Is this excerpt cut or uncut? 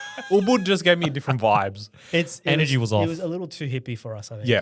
uncut